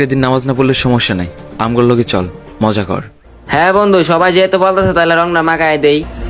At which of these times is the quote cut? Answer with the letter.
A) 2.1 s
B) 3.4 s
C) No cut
C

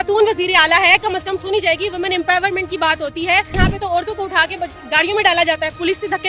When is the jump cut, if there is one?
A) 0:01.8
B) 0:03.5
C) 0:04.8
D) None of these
B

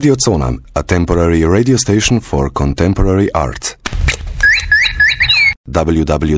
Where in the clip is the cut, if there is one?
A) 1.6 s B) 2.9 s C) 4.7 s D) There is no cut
D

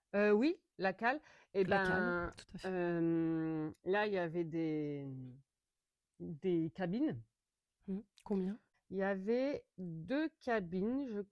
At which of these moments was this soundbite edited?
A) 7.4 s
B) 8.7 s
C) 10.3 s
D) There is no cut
B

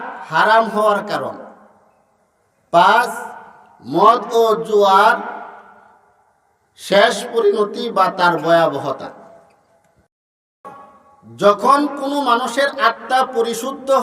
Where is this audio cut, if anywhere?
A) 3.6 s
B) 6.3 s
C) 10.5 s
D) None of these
C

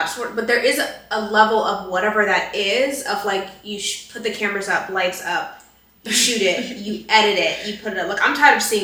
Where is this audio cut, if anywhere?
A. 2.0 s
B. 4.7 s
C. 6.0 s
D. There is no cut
D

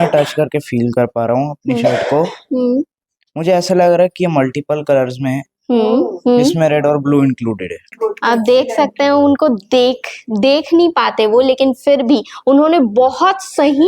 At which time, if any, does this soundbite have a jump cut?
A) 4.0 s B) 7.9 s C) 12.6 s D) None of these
B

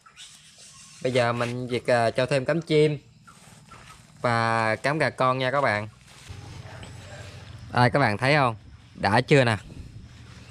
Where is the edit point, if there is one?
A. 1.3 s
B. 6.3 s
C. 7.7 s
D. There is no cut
B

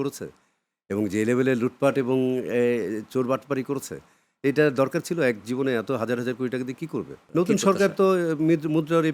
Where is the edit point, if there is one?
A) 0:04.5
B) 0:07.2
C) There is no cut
B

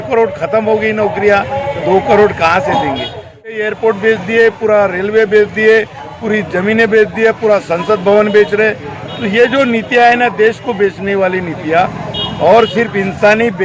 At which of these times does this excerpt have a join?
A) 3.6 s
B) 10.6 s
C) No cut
A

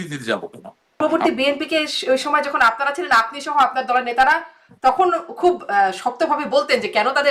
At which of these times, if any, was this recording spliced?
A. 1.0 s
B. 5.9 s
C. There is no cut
A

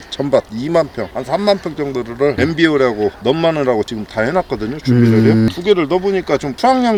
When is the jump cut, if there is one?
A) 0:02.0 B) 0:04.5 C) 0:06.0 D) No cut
D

